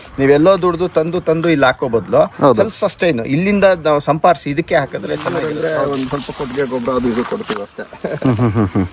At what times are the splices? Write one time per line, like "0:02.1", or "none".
0:05.2